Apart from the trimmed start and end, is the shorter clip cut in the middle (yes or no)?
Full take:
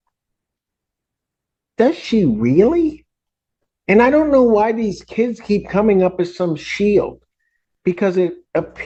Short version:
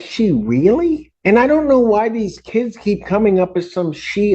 yes